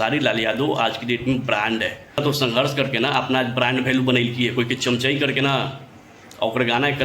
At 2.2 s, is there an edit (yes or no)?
yes